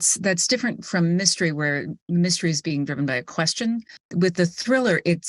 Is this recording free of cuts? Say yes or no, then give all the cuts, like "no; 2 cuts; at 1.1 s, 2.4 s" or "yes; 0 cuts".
no; 1 cut; at 4.0 s